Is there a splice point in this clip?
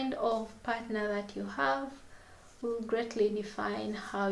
no; 0 cuts

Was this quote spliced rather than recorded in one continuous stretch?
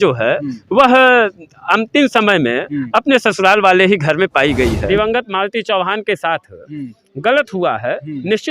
yes; 1 cut; at 4.8 s

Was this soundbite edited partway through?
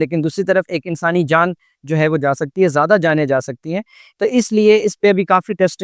no; 0 cuts

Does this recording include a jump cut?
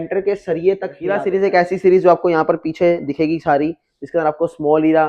yes; 1 cut; at 1.2 s

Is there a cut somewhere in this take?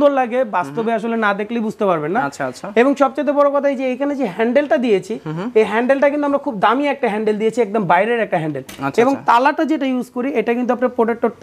no; 0 cuts

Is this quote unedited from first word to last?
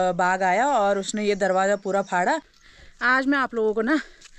no; 1 cut; at 2.5 s

